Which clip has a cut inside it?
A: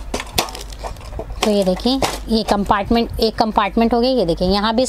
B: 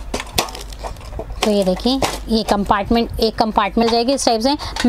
B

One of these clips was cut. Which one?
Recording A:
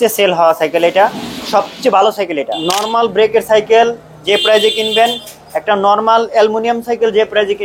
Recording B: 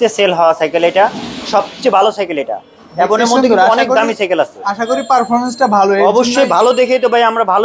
A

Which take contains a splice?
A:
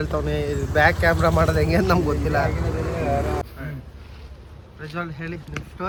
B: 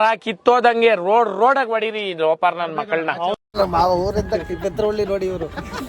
B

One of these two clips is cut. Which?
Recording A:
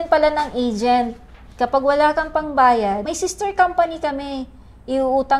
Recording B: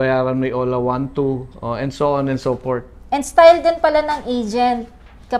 A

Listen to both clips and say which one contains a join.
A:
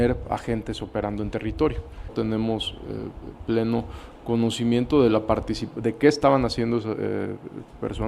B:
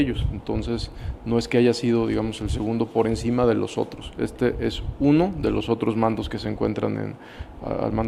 A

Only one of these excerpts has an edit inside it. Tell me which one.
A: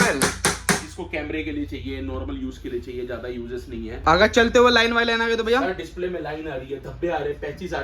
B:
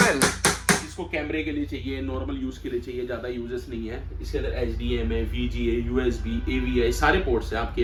A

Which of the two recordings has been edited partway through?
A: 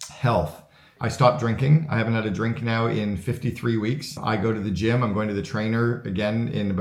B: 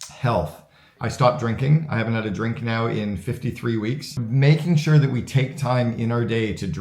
B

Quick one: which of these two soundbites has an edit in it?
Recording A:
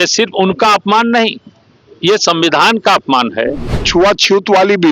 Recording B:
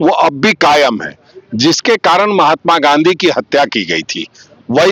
A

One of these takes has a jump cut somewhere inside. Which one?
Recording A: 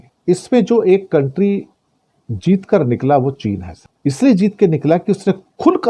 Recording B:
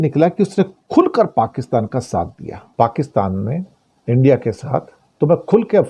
B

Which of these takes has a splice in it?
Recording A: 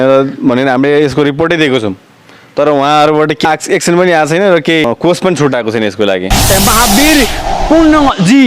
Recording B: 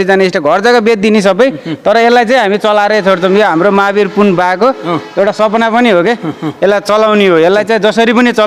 A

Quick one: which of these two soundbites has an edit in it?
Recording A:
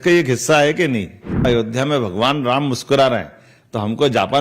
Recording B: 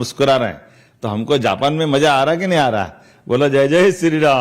A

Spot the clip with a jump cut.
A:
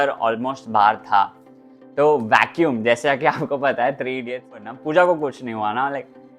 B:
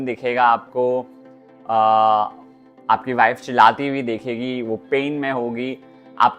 A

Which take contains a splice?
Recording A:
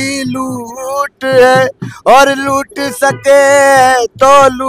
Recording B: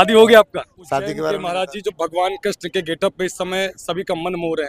B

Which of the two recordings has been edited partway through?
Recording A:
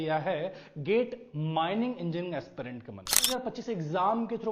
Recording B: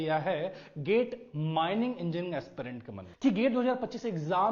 A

